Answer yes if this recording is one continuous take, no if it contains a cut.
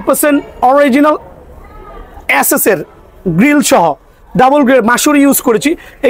yes